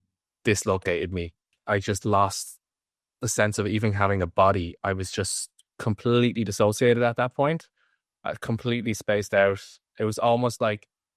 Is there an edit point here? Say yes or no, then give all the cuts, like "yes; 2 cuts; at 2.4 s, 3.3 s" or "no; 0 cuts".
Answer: yes; 1 cut; at 1.4 s